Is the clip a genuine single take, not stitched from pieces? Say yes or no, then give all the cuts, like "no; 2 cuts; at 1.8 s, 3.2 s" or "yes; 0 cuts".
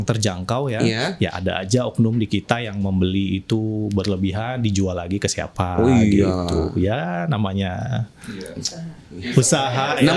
yes; 0 cuts